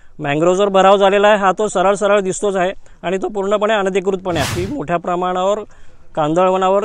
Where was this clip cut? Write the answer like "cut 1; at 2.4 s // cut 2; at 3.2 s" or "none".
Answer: cut 1; at 4.6 s